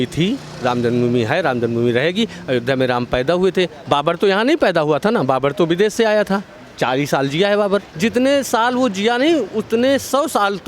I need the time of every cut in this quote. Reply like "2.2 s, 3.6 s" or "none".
3.8 s, 7.9 s